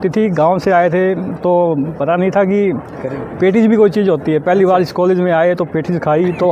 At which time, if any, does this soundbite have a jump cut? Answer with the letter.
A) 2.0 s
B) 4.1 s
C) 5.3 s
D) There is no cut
D